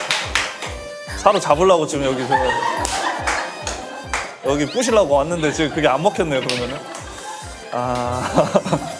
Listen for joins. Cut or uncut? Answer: uncut